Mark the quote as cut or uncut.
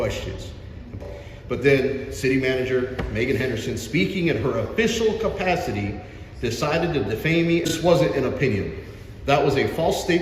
cut